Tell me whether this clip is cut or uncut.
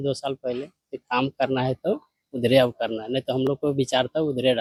uncut